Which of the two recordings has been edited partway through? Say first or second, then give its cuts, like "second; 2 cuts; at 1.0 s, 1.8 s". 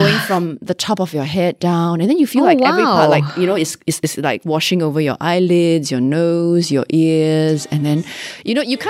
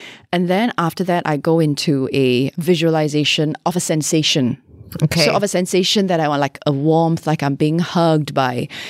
second; 2 cuts; at 2.5 s, 3.6 s